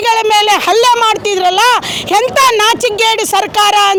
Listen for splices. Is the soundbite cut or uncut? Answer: uncut